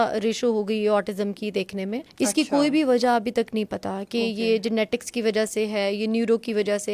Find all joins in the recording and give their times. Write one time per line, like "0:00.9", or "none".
0:02.0